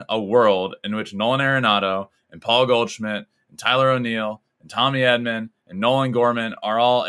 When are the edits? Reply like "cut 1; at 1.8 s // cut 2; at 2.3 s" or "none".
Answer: none

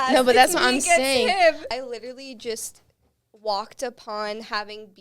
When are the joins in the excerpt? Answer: cut 1; at 1.6 s

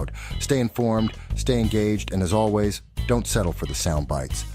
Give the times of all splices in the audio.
cut 1; at 3.3 s

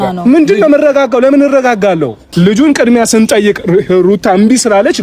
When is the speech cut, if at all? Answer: cut 1; at 2.2 s

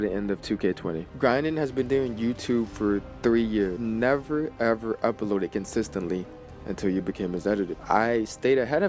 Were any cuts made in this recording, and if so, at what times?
cut 1; at 1.0 s // cut 2; at 3.1 s // cut 3; at 3.8 s // cut 4; at 7.8 s

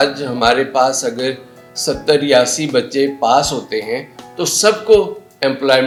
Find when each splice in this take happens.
none

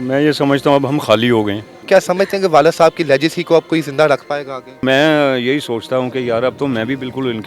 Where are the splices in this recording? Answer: cut 1; at 1.7 s // cut 2; at 4.8 s

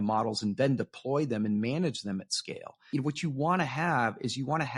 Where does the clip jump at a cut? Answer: cut 1; at 2.7 s

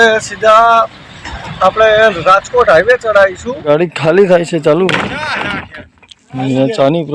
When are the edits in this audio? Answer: cut 1; at 3.6 s

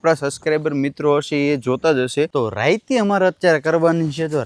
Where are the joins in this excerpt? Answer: cut 1; at 2.3 s

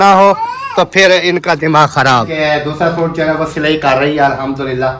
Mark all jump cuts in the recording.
cut 1; at 2.3 s

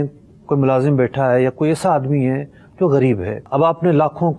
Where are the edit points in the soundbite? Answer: cut 1; at 3.3 s

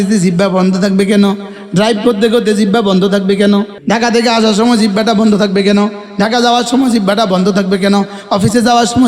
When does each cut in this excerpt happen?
cut 1; at 3.7 s

